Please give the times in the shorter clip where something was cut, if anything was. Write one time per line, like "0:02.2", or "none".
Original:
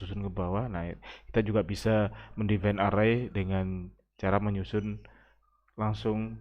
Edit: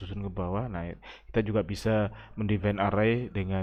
none